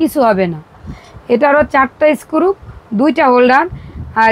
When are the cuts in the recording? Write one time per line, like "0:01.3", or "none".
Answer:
none